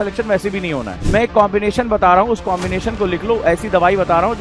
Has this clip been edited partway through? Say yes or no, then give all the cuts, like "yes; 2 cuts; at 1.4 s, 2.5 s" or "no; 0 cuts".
yes; 1 cut; at 0.9 s